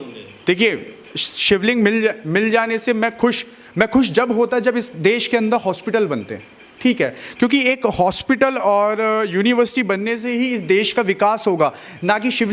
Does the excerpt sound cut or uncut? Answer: uncut